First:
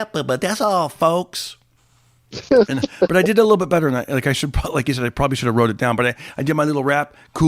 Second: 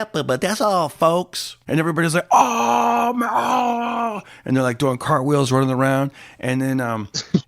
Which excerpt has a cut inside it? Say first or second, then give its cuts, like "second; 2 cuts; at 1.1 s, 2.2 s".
second; 1 cut; at 1.5 s